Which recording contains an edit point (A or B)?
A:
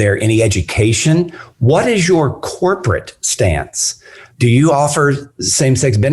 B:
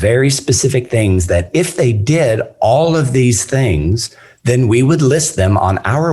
A